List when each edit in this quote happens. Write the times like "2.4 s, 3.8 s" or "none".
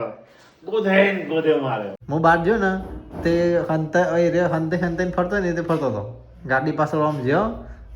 1.9 s